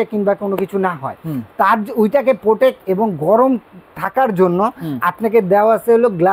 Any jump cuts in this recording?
no; 0 cuts

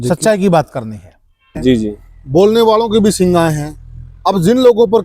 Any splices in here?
yes; 1 cut; at 1.5 s

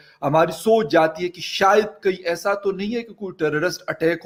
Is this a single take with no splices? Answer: yes; 0 cuts

